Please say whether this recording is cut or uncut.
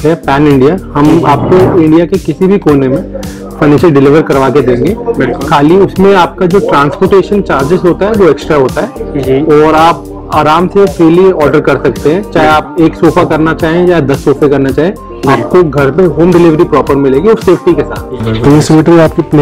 cut